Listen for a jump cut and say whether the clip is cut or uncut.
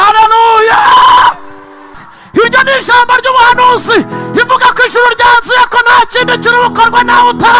cut